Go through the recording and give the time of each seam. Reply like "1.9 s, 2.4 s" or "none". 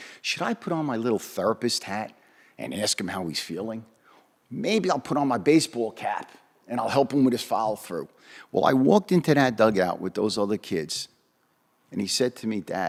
none